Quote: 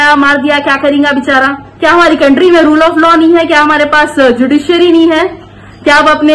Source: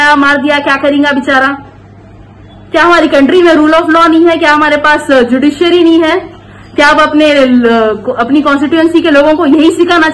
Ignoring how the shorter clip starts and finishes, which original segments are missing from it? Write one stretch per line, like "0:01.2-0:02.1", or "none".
0:01.6-0:02.6